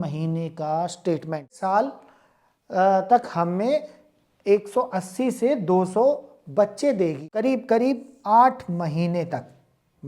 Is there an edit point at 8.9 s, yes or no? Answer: no